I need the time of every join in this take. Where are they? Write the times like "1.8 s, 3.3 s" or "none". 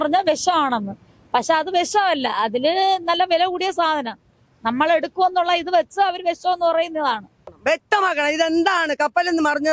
7.5 s